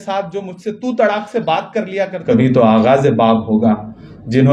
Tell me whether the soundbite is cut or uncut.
cut